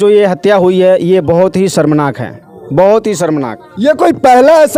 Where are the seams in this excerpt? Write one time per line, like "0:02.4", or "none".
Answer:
none